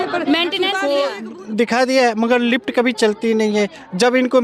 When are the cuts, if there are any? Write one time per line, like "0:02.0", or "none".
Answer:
0:01.1